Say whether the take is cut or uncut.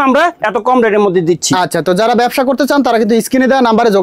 uncut